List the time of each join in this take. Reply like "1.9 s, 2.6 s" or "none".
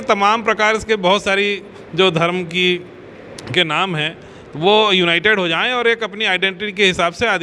none